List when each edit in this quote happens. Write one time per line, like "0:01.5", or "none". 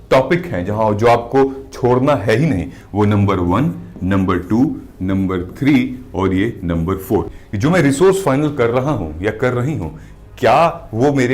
0:07.3